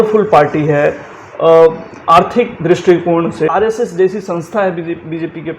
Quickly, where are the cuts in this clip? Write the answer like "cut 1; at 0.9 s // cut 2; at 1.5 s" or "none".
cut 1; at 3.5 s